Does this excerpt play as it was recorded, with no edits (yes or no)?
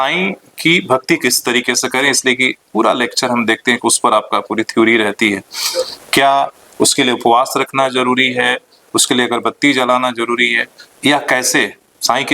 yes